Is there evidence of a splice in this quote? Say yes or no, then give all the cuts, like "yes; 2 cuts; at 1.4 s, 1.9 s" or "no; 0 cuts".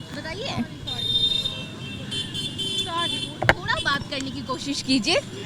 no; 0 cuts